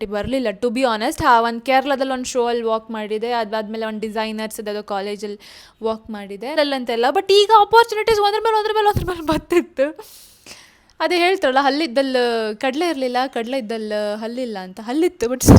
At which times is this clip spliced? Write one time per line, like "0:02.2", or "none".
0:06.5